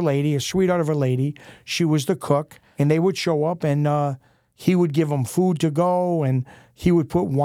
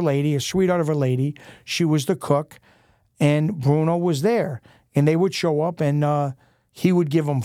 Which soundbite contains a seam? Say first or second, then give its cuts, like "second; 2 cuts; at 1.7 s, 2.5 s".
first; 1 cut; at 2.6 s